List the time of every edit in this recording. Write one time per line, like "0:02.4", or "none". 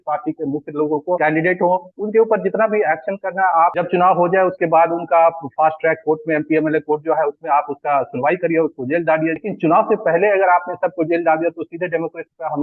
0:01.2
0:03.7
0:09.5